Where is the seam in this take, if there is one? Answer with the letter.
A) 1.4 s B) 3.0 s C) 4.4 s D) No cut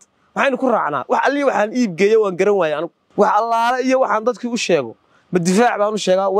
B